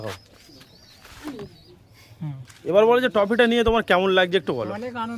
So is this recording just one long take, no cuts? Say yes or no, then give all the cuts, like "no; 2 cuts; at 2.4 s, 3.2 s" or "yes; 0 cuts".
yes; 0 cuts